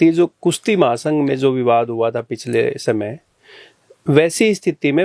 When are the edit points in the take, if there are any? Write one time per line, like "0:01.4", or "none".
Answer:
none